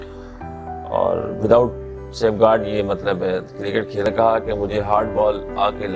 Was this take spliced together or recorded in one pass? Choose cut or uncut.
cut